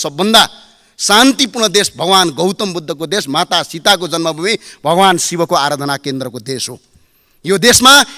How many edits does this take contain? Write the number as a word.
zero